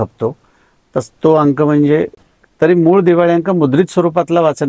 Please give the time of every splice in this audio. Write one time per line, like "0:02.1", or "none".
0:02.1